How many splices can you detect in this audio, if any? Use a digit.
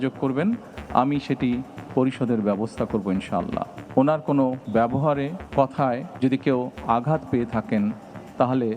3